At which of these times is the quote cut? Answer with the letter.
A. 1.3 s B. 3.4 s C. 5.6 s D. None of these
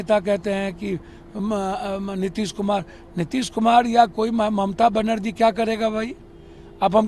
D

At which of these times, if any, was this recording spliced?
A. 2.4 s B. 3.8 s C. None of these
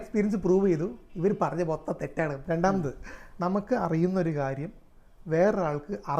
A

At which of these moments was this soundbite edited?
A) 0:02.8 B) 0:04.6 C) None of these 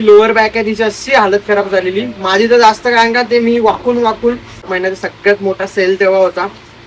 B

